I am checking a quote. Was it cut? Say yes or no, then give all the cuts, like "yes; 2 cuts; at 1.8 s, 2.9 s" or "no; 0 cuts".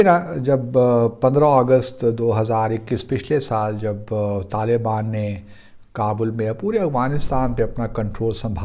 no; 0 cuts